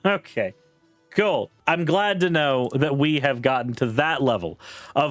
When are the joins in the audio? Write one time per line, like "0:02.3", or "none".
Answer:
0:01.5